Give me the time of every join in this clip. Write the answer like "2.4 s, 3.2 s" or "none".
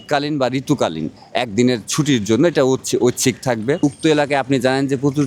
3.8 s